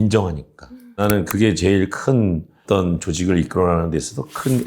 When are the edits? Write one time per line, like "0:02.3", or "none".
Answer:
0:01.0

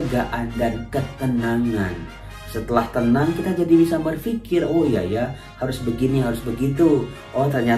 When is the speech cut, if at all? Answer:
none

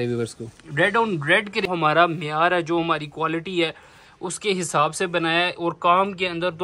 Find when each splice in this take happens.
0:01.7

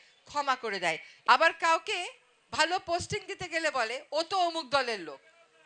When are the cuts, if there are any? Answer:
0:01.1

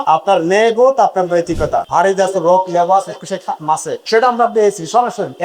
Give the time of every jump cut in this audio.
0:01.8

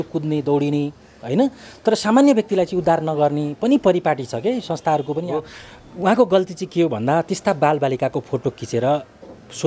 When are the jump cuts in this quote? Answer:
0:05.4

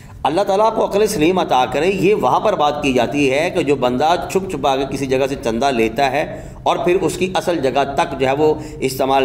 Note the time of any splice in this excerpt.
none

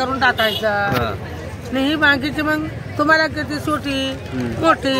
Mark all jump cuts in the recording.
none

